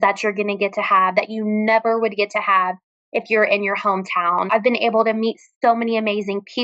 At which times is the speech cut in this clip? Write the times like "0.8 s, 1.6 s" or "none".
4.5 s